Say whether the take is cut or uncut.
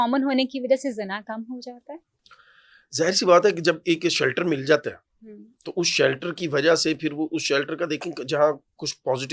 uncut